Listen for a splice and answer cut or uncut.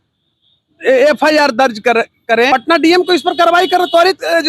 cut